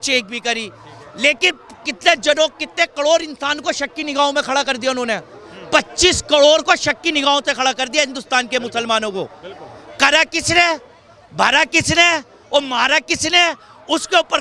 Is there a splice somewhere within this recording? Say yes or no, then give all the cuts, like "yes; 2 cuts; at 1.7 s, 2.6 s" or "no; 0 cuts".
no; 0 cuts